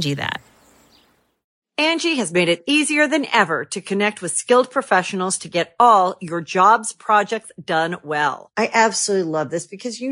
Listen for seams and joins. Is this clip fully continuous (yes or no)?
no